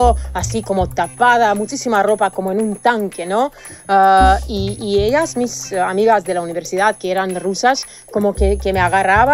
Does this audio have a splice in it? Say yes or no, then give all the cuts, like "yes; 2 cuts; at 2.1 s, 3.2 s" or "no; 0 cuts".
no; 0 cuts